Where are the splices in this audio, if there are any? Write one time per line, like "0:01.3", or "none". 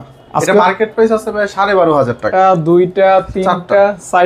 0:02.2